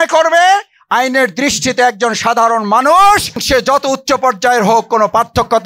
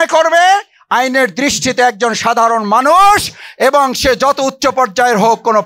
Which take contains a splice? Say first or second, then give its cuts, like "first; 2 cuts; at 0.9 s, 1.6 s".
first; 1 cut; at 3.4 s